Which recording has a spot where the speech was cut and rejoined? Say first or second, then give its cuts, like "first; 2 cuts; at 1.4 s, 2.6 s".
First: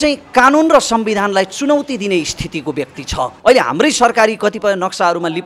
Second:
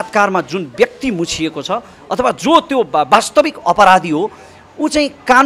first; 1 cut; at 3.3 s